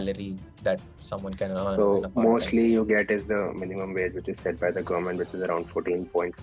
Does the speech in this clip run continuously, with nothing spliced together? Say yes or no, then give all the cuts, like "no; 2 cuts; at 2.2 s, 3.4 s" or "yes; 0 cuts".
yes; 0 cuts